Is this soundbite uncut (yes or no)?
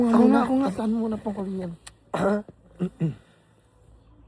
yes